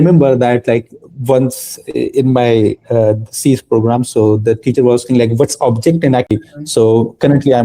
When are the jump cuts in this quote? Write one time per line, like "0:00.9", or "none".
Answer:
0:06.3